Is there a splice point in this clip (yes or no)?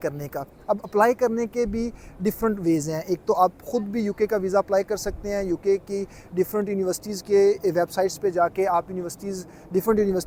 no